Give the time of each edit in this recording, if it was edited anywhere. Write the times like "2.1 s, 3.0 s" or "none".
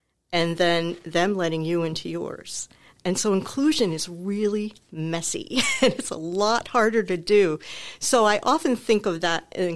none